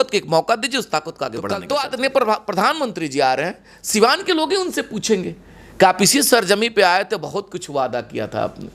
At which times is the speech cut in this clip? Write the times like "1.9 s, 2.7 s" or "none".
1.6 s